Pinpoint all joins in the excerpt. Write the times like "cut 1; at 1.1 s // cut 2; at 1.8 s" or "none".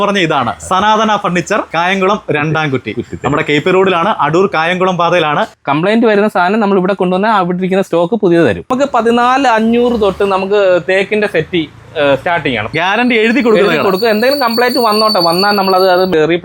cut 1; at 5.5 s // cut 2; at 8.6 s // cut 3; at 12.7 s